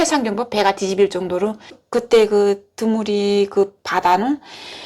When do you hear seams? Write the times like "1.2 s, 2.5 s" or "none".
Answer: 1.9 s